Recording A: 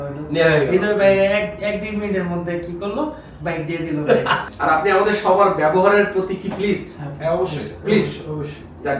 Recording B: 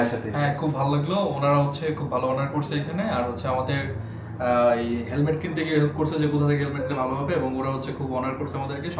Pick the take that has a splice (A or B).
A